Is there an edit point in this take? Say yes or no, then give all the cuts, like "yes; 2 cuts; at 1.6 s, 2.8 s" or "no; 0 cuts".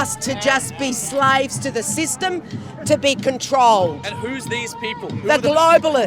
no; 0 cuts